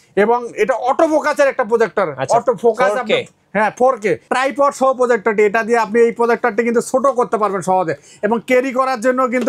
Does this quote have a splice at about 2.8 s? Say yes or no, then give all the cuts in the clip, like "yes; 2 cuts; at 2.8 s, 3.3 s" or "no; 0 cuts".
no; 1 cut; at 4.2 s